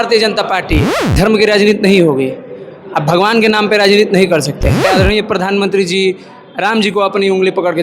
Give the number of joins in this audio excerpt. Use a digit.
2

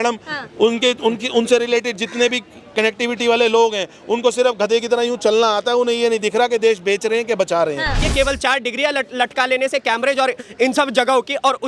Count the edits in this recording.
1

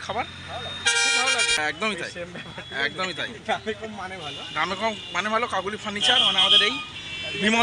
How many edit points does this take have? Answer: 1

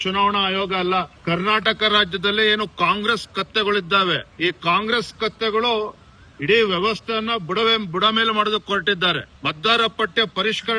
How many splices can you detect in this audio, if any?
3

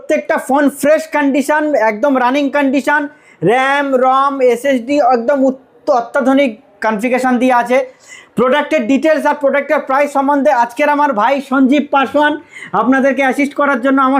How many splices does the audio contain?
0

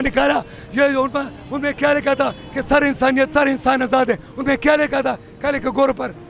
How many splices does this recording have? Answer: 1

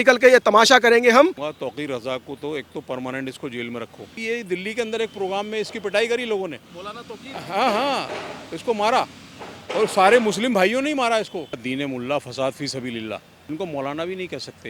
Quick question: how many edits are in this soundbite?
4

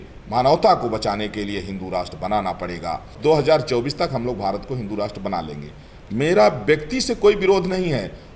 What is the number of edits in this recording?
1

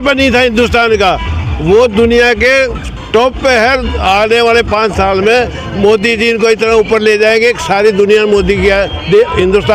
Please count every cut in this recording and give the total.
0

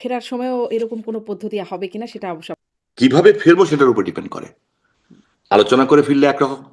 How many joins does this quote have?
1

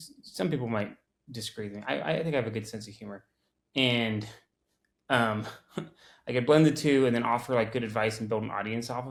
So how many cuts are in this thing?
0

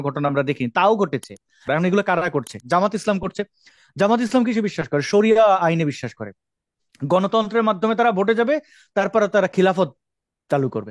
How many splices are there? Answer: 1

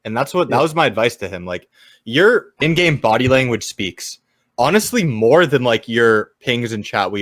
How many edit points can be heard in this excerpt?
1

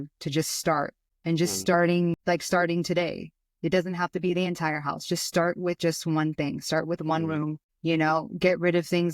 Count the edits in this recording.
3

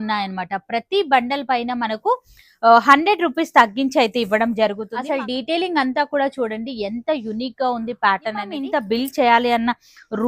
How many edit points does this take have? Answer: 2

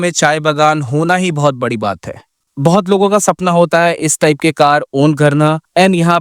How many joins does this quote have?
1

